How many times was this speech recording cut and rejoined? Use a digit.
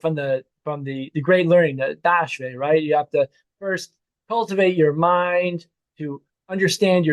1